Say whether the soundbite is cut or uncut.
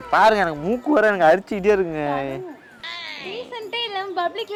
uncut